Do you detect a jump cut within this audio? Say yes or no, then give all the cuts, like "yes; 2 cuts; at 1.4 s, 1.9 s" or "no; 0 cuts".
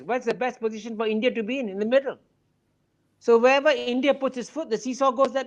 no; 0 cuts